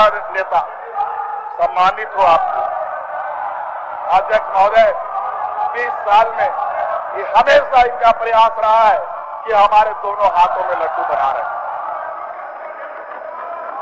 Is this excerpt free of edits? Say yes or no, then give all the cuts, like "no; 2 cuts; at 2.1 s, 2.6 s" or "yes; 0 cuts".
yes; 0 cuts